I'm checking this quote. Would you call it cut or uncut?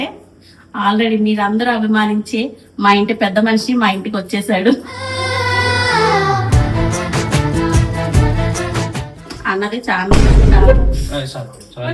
cut